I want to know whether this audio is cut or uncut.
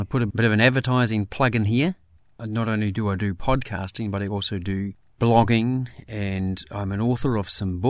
cut